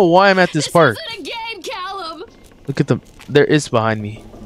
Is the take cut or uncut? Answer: cut